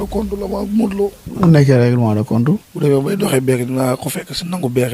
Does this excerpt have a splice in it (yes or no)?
yes